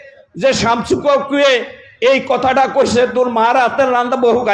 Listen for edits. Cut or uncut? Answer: uncut